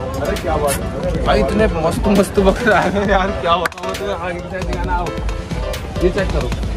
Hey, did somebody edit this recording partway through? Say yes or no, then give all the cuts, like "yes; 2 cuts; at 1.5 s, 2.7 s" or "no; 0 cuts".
no; 0 cuts